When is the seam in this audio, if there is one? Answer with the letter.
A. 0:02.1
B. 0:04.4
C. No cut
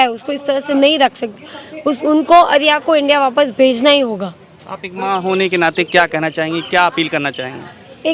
C